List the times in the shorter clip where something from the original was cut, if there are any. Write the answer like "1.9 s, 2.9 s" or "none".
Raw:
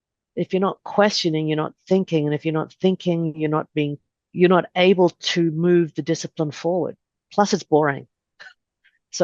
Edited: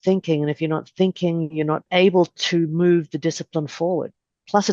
1.8 s